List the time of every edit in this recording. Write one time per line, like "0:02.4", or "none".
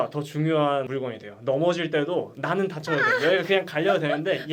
0:00.9